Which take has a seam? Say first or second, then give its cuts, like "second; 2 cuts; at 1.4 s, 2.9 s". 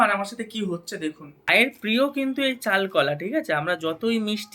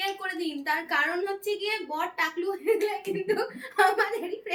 first; 1 cut; at 1.2 s